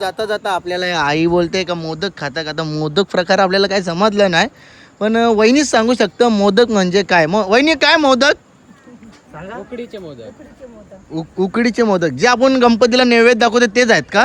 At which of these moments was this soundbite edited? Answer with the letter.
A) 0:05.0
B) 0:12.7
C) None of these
C